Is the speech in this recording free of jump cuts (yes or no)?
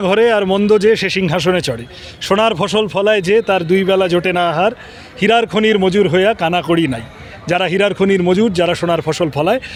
yes